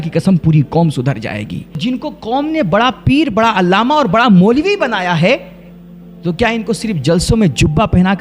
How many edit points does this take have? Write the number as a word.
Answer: one